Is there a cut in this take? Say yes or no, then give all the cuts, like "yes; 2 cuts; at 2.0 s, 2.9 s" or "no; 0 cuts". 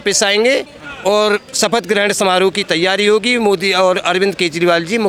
no; 0 cuts